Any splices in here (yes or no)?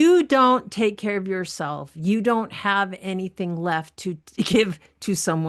no